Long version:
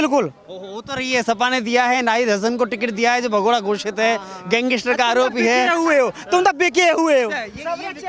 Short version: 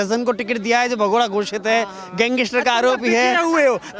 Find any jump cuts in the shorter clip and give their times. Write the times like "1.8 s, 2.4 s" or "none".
none